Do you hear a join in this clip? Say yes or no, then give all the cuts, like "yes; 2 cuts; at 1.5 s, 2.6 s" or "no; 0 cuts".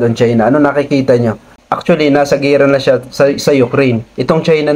yes; 1 cut; at 1.5 s